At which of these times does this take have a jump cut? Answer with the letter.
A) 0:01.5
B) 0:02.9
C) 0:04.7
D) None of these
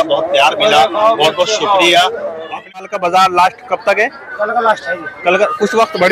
B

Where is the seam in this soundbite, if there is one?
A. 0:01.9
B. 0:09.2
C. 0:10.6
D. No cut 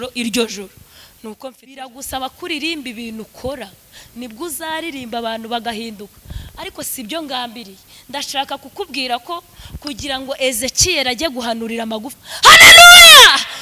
A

